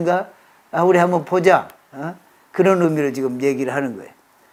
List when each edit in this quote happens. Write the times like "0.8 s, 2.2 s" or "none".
none